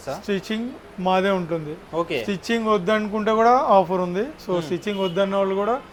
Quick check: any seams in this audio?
no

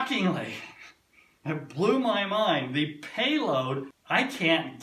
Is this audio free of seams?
no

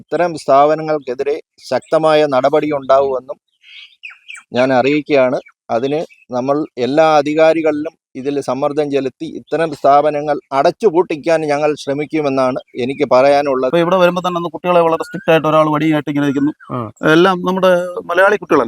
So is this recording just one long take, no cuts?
no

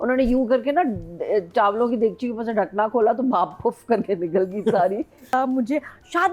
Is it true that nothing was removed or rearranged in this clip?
no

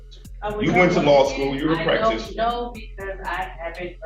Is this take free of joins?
yes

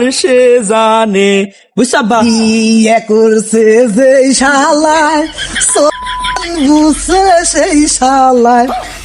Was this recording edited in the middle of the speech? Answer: no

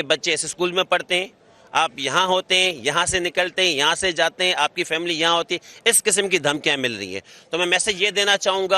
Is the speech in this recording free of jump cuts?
yes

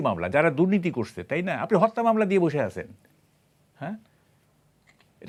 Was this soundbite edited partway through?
no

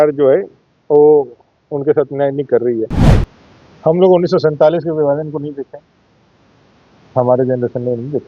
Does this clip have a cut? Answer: yes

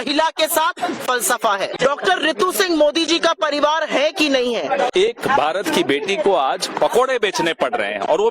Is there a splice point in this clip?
yes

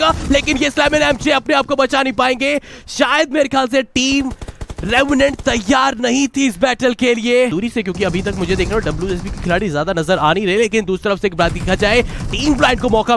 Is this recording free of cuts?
yes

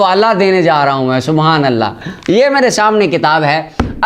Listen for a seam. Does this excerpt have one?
no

